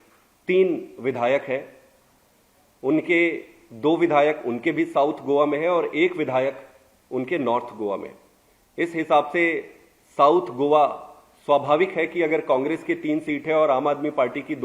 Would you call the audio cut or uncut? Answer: uncut